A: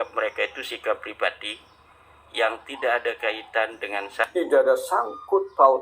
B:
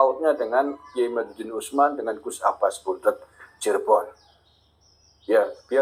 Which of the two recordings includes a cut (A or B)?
A